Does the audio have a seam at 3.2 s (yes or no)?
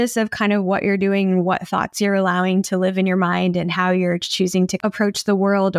no